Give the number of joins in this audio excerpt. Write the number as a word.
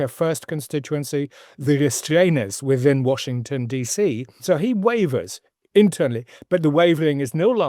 one